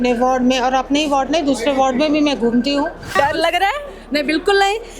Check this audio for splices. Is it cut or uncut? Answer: cut